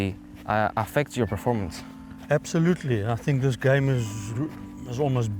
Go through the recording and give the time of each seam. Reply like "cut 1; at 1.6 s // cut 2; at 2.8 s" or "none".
none

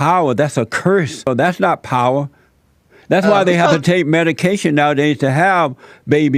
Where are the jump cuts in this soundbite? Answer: cut 1; at 1.3 s

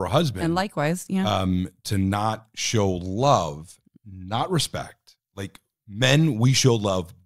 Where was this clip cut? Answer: none

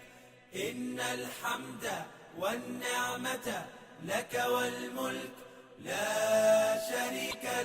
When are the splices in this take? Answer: cut 1; at 6.8 s

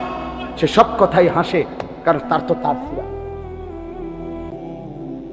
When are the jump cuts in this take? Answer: none

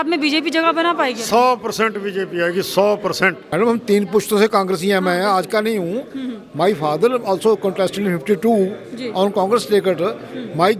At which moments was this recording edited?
cut 1; at 3.4 s

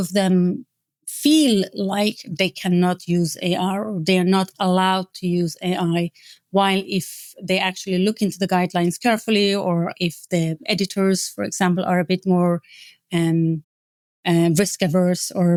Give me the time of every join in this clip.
none

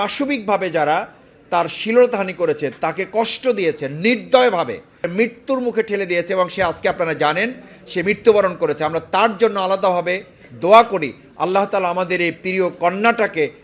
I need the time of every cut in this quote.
cut 1; at 5.1 s

